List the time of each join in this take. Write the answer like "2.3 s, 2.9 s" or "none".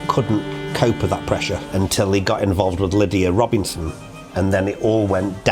1.6 s